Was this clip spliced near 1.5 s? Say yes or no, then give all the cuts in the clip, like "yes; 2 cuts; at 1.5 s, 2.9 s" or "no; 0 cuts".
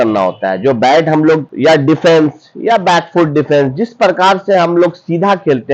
yes; 1 cut; at 1.5 s